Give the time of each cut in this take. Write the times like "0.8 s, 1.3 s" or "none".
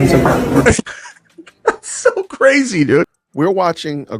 3.2 s